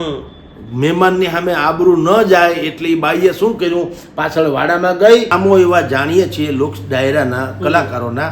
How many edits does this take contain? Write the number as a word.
one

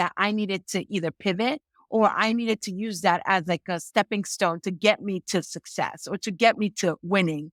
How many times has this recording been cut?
zero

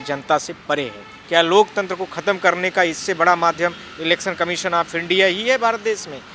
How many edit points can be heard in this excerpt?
one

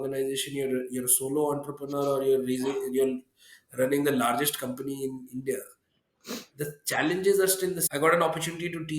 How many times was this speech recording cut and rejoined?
one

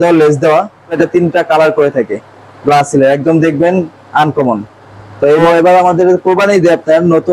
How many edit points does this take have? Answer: two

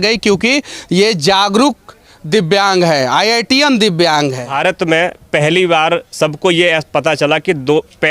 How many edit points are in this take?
one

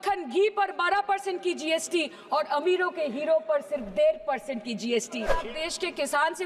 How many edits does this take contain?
one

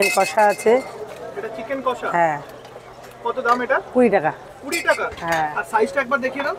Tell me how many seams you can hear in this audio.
zero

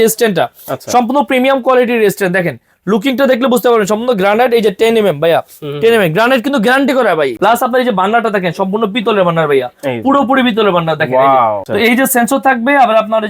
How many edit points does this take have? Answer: two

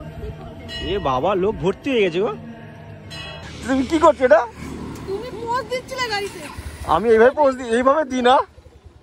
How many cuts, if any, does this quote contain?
one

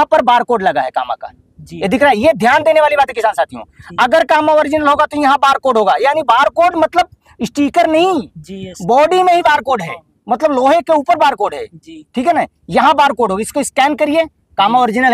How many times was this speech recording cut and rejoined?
zero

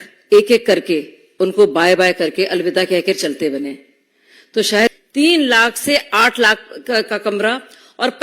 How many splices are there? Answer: one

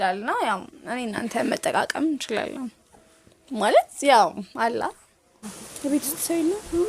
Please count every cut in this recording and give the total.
one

